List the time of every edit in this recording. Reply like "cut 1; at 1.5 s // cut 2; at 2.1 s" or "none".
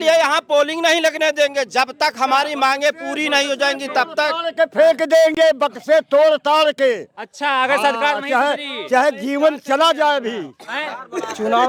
none